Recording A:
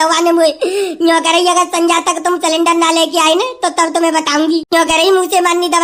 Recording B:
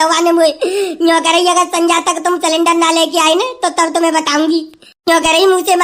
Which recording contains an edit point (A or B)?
A